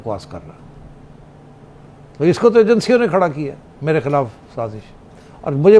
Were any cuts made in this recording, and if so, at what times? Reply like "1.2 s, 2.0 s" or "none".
none